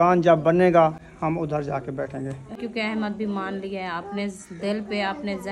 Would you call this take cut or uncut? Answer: cut